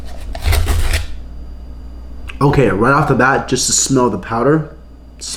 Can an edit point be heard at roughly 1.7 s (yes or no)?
no